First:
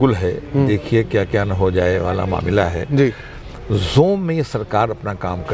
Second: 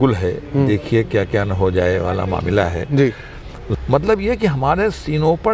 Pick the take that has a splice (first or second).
second